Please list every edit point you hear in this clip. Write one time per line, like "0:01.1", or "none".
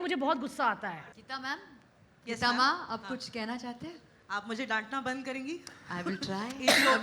0:01.1